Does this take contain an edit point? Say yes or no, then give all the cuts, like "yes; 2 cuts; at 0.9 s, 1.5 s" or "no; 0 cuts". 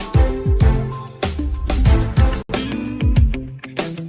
yes; 1 cut; at 2.4 s